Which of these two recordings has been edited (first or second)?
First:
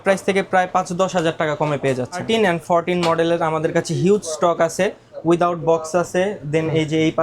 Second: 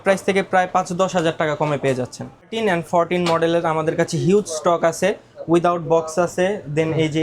first